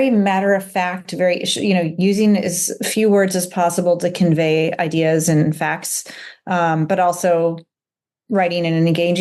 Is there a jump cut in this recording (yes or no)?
no